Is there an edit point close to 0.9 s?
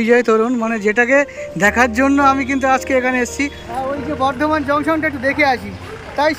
no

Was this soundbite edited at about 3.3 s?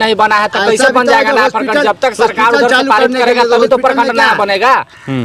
no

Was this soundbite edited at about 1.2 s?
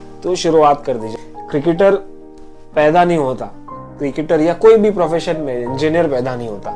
yes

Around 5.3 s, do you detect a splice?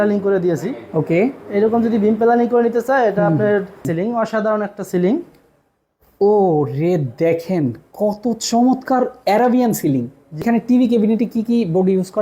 no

